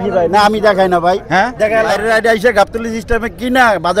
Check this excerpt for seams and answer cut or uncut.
cut